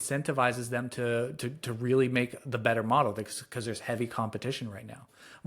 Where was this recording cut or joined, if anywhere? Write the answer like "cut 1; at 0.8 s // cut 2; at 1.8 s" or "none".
none